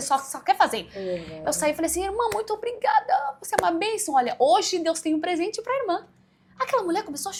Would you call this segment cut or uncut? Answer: uncut